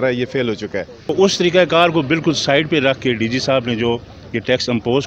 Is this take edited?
yes; 1 cut; at 1.1 s

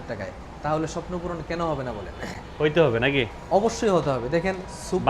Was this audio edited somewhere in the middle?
no; 0 cuts

